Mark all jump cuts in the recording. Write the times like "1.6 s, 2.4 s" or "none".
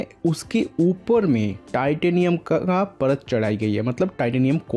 none